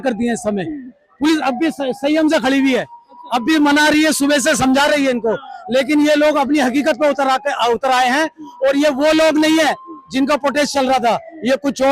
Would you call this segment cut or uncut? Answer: uncut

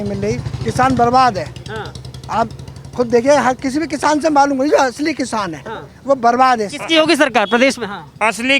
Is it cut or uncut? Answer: uncut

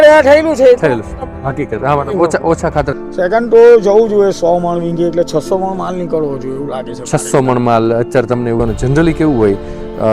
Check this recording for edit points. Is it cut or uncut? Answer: cut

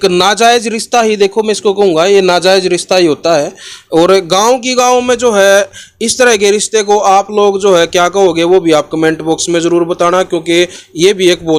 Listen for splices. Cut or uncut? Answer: uncut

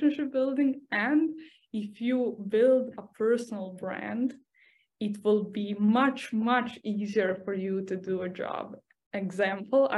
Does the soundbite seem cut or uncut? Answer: uncut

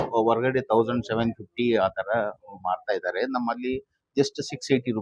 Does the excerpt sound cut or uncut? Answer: uncut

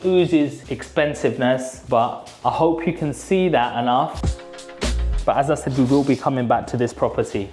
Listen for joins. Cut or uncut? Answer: uncut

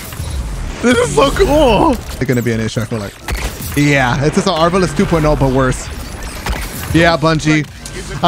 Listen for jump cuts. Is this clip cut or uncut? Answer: cut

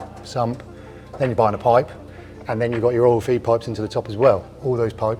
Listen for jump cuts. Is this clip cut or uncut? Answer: uncut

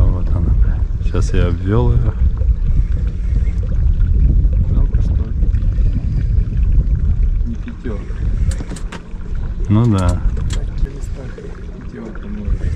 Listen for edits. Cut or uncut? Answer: cut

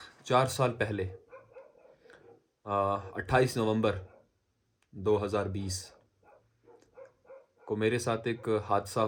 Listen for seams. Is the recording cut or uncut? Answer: uncut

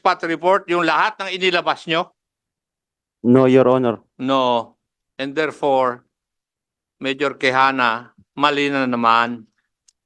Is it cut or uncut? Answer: uncut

